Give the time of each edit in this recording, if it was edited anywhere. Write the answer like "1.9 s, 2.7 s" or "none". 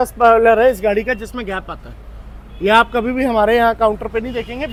none